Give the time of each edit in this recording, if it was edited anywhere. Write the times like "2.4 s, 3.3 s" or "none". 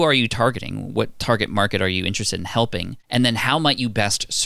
3.0 s

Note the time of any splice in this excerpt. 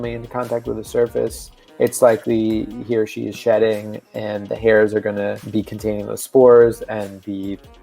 5.4 s

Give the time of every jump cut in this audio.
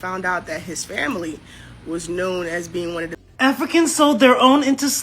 3.2 s

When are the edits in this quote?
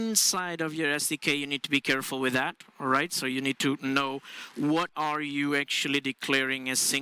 none

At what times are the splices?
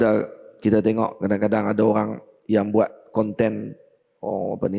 none

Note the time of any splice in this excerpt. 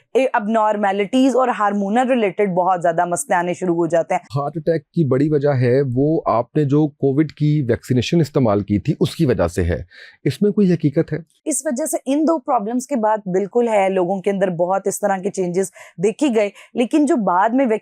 4.4 s, 11.5 s

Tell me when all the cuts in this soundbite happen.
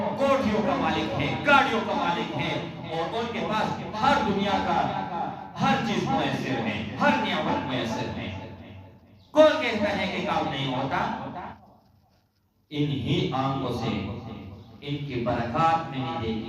11.5 s

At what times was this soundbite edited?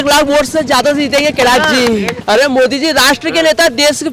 2.2 s

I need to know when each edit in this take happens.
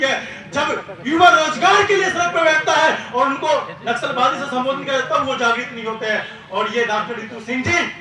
none

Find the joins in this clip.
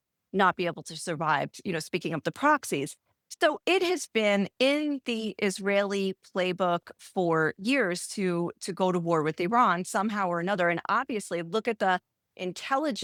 none

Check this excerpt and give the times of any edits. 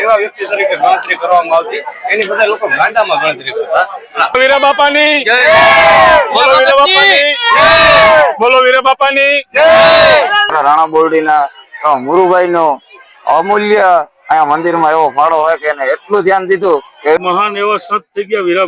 4.3 s, 10.5 s, 17.2 s

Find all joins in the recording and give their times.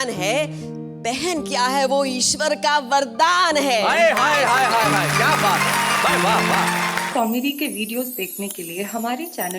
7.0 s

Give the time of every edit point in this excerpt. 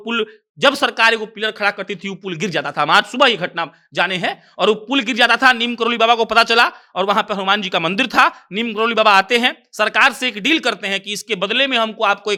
none

